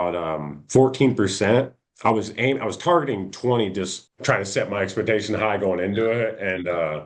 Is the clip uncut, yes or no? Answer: yes